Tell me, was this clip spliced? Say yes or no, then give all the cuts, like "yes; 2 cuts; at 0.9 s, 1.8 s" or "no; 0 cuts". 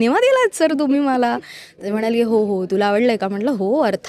no; 0 cuts